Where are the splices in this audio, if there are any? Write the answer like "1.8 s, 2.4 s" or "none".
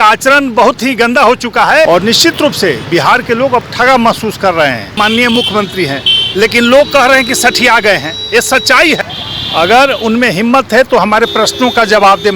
1.9 s, 4.9 s, 9.0 s